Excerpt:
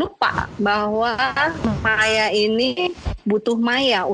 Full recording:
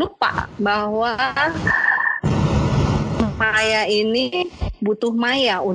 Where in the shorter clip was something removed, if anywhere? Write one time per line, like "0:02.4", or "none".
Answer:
0:01.6